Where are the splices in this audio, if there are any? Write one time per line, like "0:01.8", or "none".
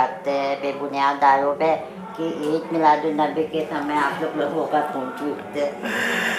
none